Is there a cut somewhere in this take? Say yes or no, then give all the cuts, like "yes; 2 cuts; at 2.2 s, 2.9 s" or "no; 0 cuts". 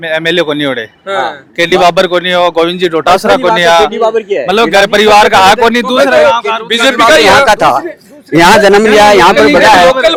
no; 0 cuts